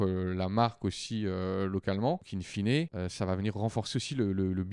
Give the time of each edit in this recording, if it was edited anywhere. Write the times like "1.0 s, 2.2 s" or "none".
2.3 s, 2.9 s